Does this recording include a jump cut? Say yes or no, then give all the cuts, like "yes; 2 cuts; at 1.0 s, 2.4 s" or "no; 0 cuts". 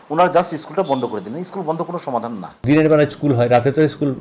yes; 1 cut; at 2.6 s